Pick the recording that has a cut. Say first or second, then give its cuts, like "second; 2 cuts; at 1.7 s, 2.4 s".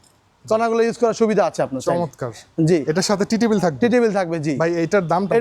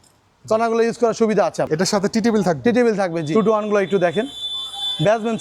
second; 2 cuts; at 1.7 s, 3.4 s